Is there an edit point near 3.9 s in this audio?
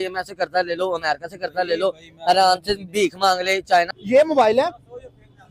yes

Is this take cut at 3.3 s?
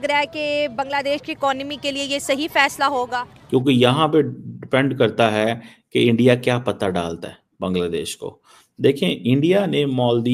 yes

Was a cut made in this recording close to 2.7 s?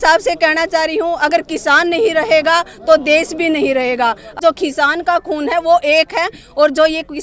no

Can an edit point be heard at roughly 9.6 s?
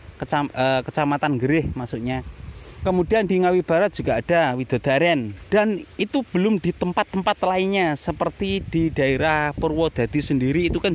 no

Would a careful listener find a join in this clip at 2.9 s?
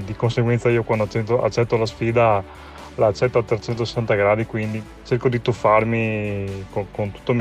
no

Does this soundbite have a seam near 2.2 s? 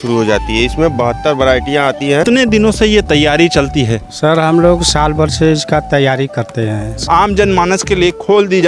yes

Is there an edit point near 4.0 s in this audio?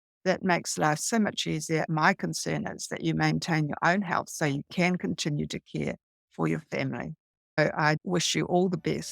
no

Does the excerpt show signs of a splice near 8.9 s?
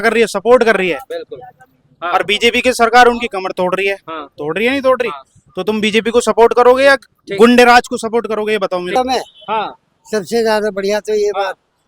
yes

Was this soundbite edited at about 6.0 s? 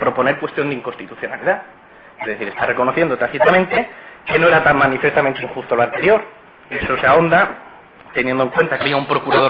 yes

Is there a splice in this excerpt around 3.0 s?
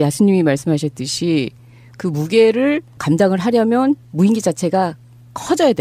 no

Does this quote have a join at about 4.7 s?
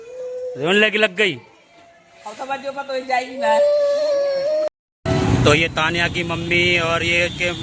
yes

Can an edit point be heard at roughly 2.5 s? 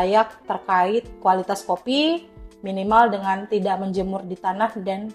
no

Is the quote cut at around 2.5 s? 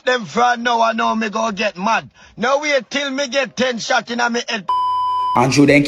no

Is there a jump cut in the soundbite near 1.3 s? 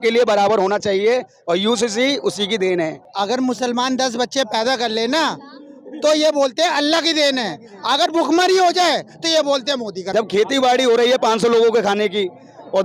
no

